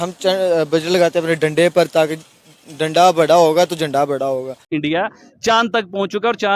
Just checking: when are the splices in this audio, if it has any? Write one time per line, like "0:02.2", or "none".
0:04.7